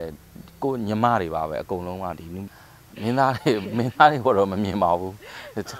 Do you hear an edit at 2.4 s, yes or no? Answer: yes